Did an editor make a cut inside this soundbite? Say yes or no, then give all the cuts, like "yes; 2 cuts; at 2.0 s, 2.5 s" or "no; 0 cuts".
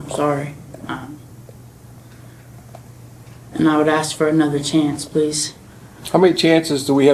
no; 0 cuts